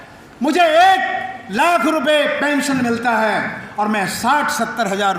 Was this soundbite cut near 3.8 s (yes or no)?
no